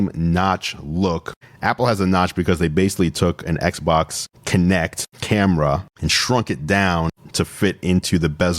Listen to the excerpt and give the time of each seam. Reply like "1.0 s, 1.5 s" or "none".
1.3 s